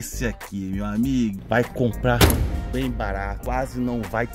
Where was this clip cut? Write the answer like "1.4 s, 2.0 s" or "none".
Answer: 1.4 s, 3.4 s